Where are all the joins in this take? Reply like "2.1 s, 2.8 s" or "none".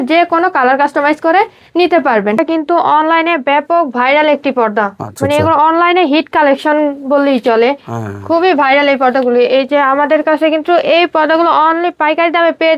none